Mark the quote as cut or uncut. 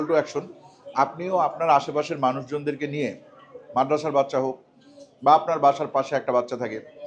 uncut